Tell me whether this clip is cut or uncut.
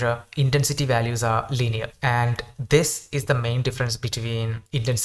uncut